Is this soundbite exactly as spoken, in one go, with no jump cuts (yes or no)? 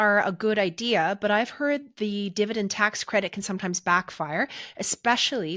yes